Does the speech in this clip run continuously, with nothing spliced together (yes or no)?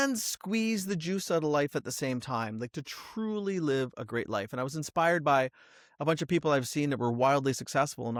yes